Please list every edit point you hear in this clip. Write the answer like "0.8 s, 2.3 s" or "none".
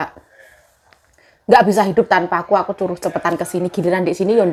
none